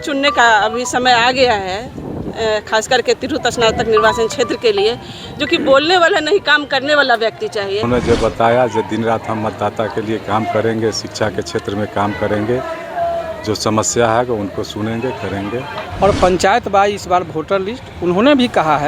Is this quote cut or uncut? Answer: cut